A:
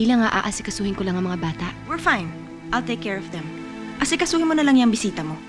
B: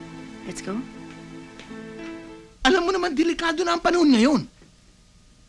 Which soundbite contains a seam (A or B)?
B